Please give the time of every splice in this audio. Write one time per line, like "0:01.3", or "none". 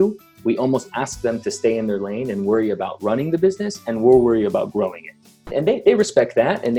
0:05.4